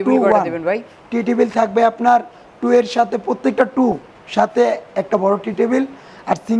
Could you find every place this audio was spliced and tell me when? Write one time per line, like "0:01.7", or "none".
none

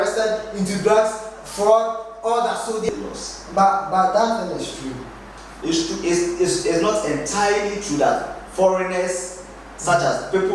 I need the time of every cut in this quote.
0:02.9

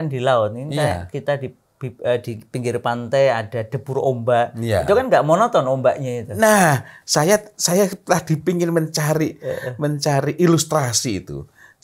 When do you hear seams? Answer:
none

